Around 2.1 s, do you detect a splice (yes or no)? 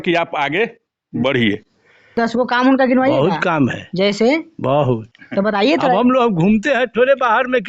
yes